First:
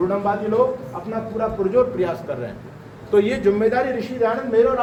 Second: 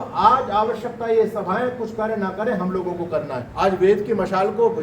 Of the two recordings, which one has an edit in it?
second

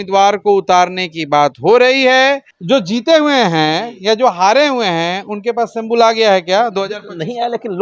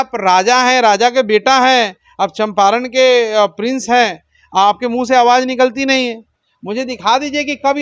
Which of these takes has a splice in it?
first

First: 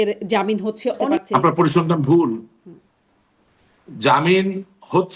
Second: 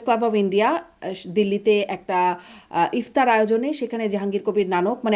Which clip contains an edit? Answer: first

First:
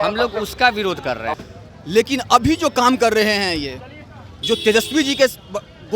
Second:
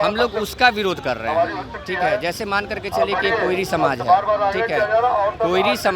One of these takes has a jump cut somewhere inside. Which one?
first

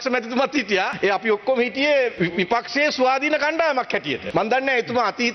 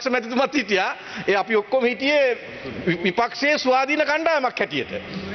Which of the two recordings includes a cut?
first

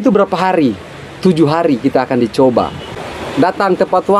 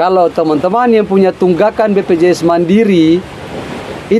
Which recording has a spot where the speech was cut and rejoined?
first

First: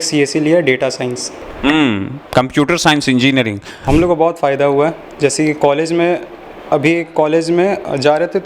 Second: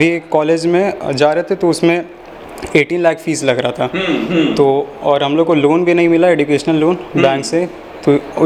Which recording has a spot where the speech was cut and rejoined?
first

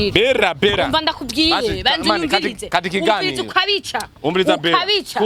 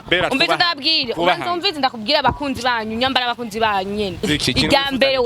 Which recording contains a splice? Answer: second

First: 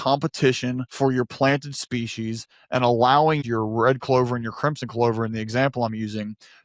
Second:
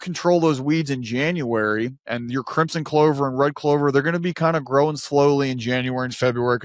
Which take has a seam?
first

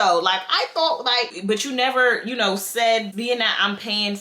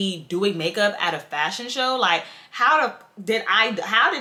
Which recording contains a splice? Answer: first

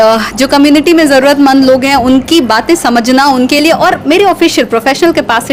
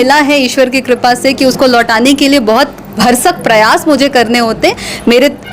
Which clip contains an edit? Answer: second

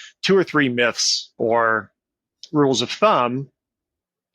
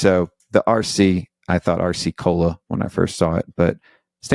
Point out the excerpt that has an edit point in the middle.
first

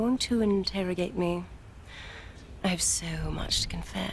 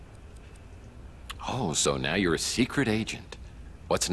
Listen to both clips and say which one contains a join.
second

